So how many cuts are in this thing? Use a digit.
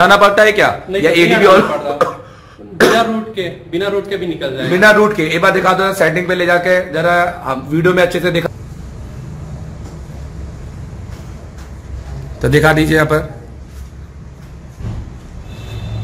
1